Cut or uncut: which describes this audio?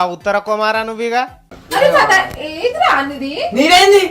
cut